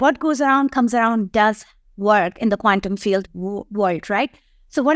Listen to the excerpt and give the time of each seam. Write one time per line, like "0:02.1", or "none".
none